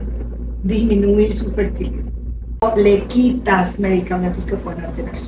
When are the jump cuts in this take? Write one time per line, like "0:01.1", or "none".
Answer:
0:02.6